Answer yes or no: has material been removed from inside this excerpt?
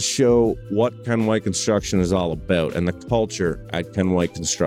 no